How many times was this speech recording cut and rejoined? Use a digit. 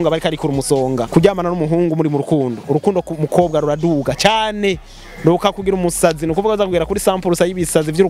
1